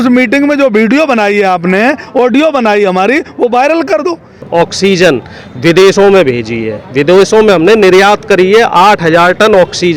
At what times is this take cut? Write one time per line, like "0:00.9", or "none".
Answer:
0:04.4